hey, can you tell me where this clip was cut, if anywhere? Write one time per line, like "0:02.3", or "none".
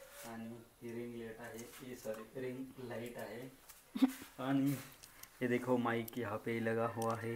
none